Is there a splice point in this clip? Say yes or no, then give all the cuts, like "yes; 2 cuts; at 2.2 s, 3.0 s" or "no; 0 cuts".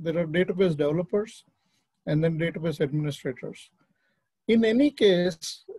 no; 0 cuts